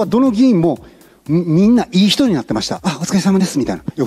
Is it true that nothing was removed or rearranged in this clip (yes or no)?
no